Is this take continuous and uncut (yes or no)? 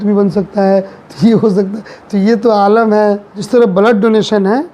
no